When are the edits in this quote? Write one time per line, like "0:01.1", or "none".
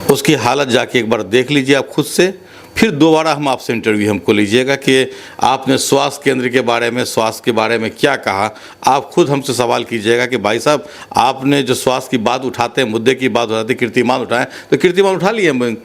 none